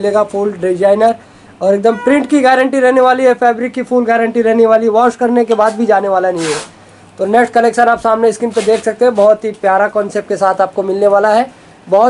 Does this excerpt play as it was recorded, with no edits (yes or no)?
yes